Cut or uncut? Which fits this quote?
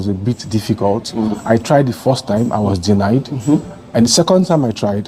uncut